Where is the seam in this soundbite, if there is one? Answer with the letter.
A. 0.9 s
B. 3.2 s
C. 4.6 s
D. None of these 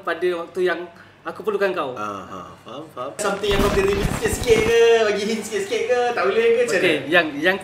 B